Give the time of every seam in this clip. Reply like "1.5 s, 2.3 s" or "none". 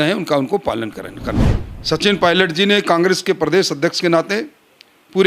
1.5 s